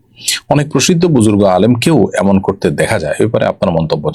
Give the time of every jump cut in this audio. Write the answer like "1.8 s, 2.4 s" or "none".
none

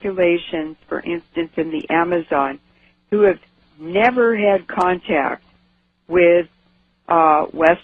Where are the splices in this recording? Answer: none

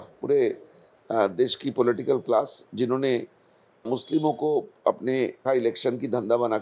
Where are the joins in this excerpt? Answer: 5.4 s

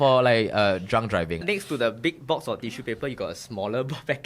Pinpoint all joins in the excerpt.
1.4 s

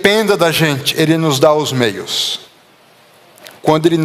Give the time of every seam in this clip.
none

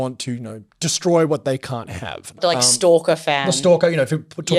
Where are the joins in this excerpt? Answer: 2.4 s

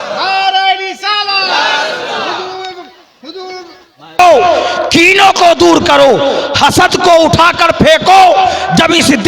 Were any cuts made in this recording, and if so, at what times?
4.2 s

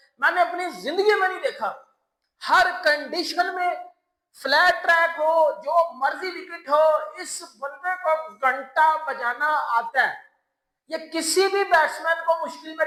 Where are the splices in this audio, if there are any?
none

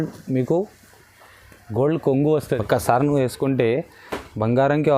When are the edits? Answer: 2.4 s

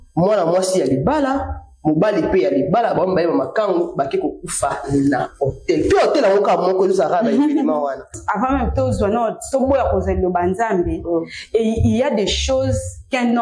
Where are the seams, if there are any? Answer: 8.2 s

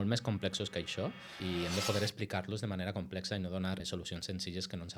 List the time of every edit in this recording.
none

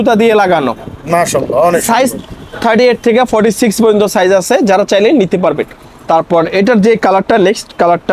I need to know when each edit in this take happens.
none

